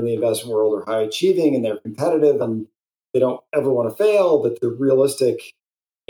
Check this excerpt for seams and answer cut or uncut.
cut